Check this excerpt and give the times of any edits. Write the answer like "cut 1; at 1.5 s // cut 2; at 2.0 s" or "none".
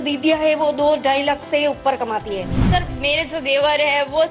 cut 1; at 2.5 s